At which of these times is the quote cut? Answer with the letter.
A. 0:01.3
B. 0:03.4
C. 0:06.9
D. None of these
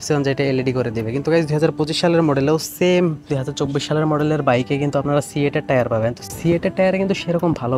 B